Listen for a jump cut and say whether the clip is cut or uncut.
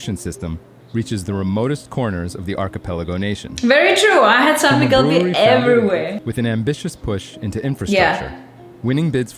cut